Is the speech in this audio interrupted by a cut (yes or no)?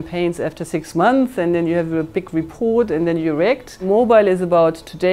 yes